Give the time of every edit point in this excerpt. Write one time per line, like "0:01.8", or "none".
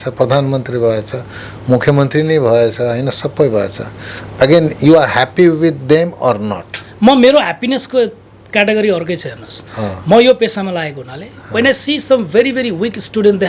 none